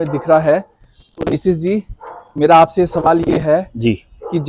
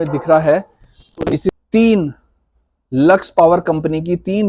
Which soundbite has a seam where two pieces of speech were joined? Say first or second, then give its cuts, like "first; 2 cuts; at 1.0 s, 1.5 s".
second; 1 cut; at 1.5 s